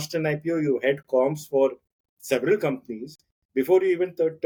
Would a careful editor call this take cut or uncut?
uncut